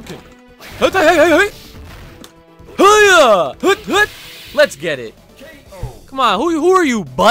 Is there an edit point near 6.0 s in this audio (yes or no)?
no